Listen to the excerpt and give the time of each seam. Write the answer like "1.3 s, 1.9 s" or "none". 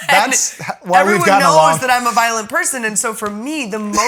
none